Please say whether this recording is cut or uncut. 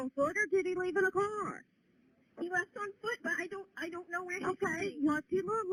uncut